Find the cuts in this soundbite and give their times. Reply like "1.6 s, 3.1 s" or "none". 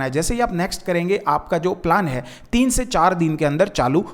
none